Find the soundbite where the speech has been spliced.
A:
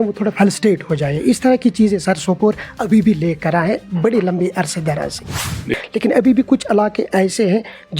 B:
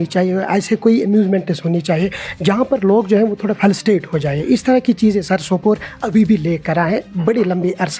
A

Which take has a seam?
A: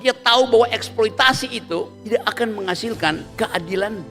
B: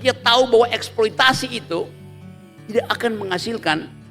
A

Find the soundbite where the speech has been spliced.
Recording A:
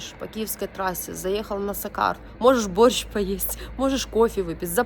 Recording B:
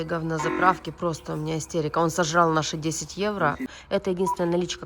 B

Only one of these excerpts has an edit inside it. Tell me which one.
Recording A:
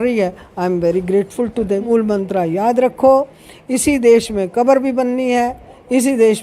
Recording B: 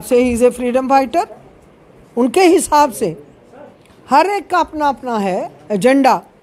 A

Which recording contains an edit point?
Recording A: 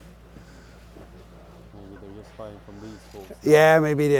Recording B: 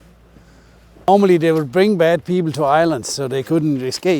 B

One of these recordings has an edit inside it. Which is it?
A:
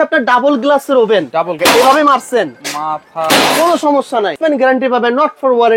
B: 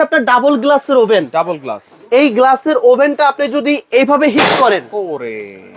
A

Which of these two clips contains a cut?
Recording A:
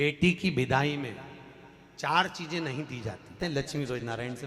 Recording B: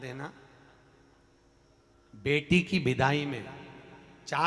A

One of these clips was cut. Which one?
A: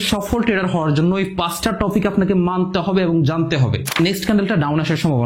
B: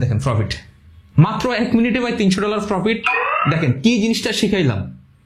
A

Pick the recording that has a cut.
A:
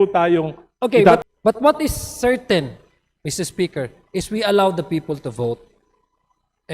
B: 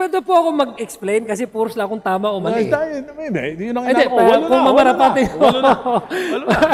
A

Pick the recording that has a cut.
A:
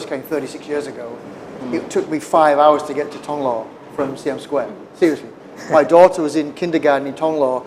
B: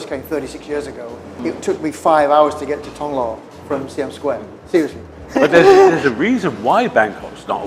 B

